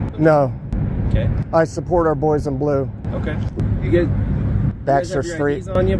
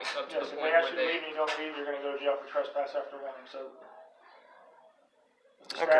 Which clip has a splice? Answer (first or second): first